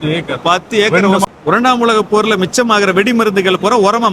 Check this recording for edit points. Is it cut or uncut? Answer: cut